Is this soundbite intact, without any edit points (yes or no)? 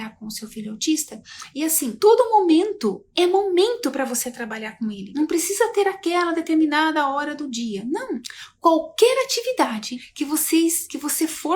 no